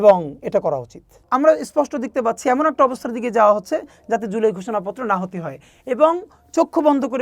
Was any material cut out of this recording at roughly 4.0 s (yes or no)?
no